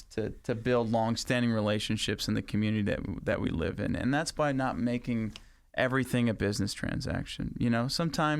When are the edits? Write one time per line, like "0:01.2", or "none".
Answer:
0:01.2